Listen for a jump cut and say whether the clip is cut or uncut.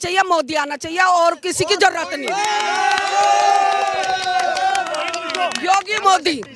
uncut